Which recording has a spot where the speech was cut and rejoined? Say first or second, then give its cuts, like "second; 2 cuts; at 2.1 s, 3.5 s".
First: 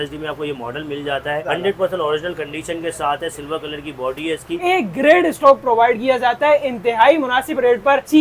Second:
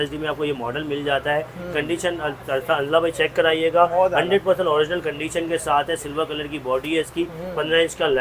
first; 2 cuts; at 1.5 s, 4.6 s